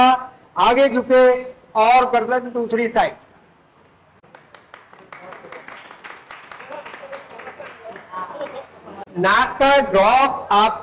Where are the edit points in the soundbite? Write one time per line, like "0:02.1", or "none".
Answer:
none